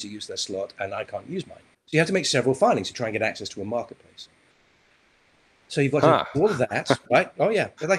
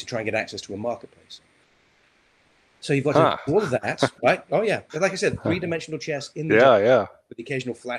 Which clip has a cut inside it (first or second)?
first